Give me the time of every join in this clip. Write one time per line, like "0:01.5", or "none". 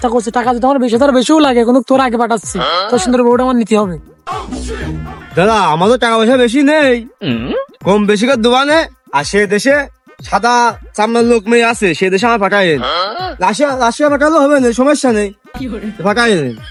none